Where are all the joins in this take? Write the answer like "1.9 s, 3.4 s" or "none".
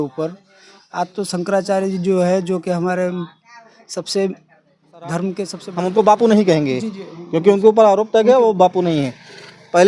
5.6 s